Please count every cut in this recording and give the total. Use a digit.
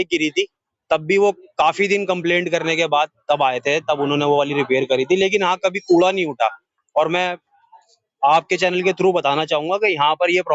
0